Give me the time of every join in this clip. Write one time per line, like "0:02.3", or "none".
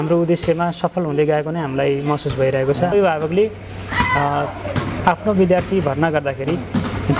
0:02.9

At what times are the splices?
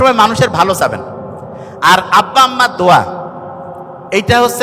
none

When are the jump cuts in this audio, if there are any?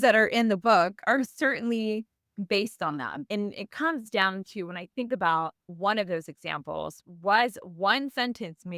0:03.3
0:05.6

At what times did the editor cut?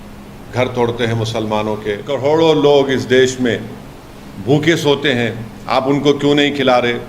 0:02.1

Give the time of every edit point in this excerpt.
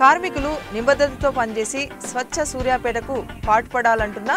none

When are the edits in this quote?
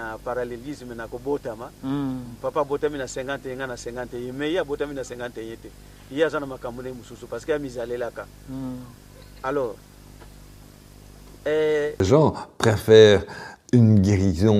0:12.1

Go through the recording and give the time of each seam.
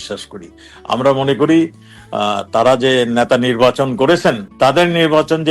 0:04.5

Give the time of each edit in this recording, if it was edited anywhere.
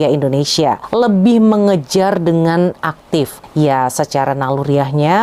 none

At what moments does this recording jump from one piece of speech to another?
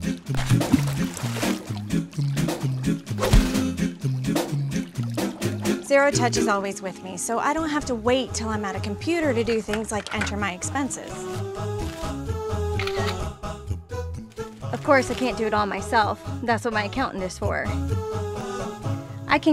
0:13.7

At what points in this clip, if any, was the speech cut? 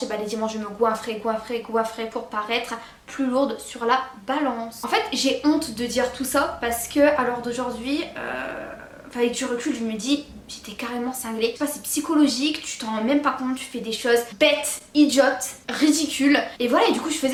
none

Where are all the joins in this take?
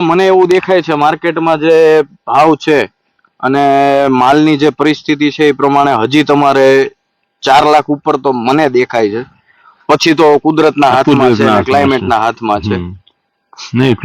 none

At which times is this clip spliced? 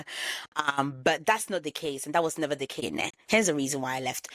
0:02.8

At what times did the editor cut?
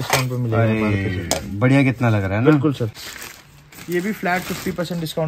0:03.1

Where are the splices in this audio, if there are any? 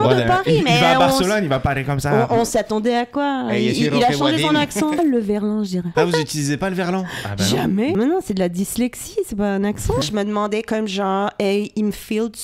0:05.0
0:05.9
0:07.9
0:10.0

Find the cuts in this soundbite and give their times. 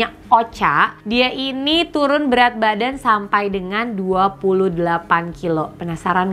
none

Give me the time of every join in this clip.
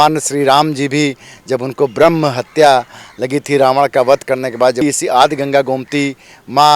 0:04.8

